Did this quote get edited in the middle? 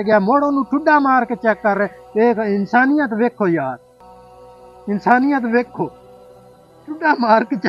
no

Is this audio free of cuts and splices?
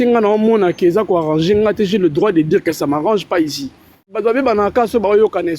no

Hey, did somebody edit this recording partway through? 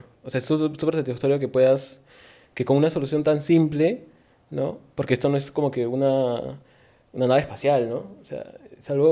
no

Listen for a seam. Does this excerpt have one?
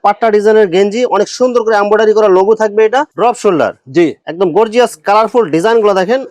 yes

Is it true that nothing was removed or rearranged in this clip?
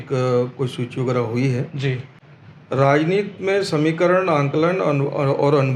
yes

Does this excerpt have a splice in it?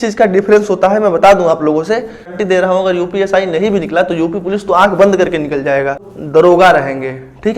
yes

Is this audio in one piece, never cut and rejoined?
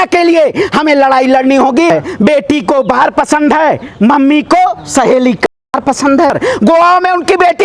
no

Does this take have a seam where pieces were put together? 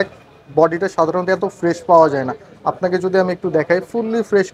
no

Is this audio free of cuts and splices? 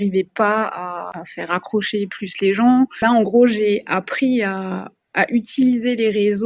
no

